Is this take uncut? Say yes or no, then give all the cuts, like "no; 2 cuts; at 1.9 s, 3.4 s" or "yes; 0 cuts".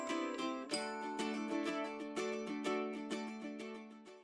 yes; 0 cuts